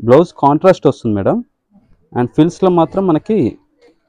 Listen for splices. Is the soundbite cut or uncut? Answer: uncut